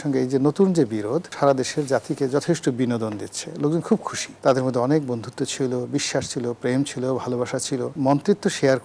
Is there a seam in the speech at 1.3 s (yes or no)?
yes